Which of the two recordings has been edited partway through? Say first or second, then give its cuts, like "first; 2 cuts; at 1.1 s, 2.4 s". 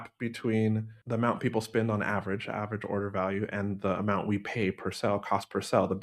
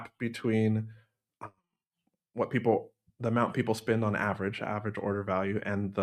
first; 1 cut; at 0.9 s